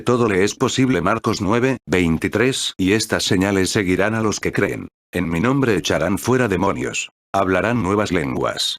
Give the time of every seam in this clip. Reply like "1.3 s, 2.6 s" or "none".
2.4 s, 4.5 s